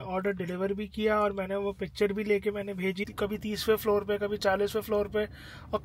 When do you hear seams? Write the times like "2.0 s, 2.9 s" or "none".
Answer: 3.1 s